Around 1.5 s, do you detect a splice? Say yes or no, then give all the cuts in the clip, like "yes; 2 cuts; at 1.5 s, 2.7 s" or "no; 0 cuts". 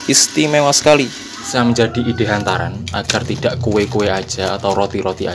yes; 1 cut; at 1.5 s